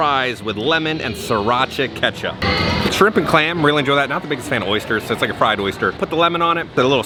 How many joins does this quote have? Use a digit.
0